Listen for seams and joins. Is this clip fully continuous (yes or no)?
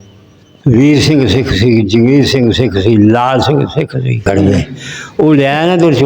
no